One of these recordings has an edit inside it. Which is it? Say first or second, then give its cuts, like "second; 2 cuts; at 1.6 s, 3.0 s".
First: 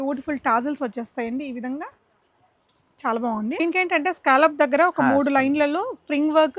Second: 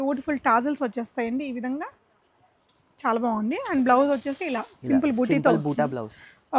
first; 1 cut; at 3.6 s